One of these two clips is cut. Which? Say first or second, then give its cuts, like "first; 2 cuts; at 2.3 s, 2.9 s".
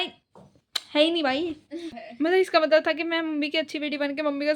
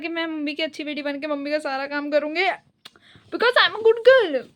first; 1 cut; at 1.9 s